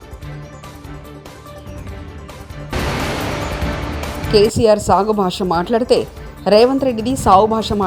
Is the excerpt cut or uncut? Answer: cut